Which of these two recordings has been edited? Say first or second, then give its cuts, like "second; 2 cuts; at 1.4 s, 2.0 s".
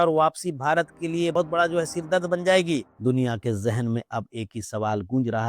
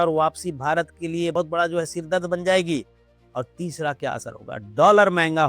first; 1 cut; at 2.9 s